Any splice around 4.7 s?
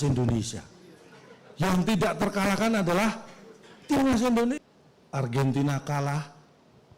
yes; 1 cut; at 4.7 s

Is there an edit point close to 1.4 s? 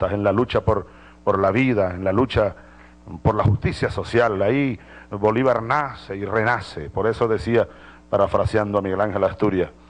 yes; 1 cut; at 1.4 s

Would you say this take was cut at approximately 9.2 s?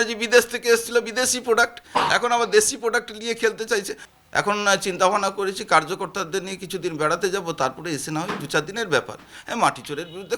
no; 1 cut; at 4.0 s

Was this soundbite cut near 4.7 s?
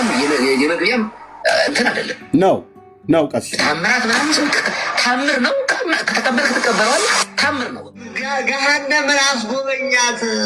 no; 3 cuts; at 1.3 s, 2.4 s, 8.2 s

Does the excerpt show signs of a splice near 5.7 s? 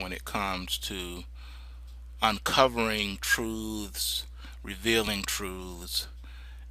no; 1 cut; at 1.1 s

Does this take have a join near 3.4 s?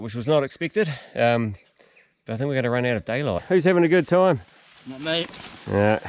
yes; 1 cut; at 3.4 s

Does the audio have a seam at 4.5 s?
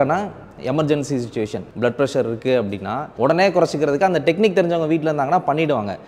no; 2 cuts; at 1.6 s, 3.1 s

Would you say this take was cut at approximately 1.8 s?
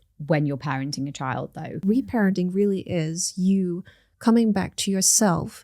yes; 1 cut; at 1.8 s

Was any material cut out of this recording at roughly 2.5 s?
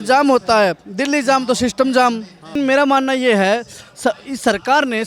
yes; 1 cut; at 2.5 s

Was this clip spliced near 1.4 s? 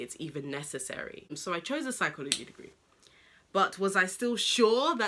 yes; 1 cut; at 1.4 s

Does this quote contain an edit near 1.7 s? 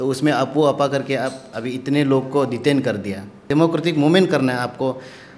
no; 1 cut; at 3.4 s

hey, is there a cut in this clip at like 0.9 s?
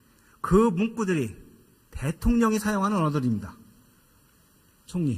yes; 1 cut; at 0.9 s

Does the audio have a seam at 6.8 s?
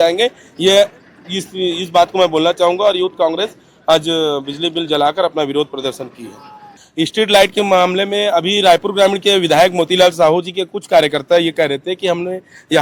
yes; 1 cut; at 6.8 s

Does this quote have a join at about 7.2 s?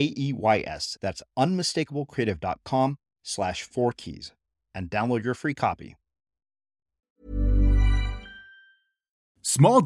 yes; 1 cut; at 7.2 s

